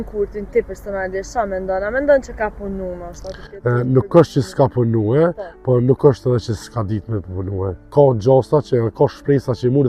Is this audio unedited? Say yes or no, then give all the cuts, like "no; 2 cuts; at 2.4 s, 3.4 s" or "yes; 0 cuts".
yes; 0 cuts